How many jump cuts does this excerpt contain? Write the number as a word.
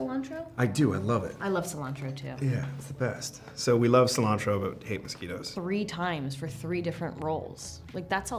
one